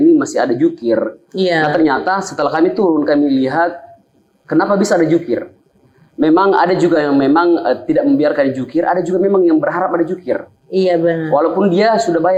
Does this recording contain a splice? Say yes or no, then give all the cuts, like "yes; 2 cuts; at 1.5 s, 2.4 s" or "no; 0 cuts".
no; 0 cuts